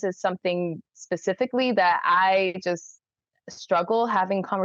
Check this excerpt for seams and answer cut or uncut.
uncut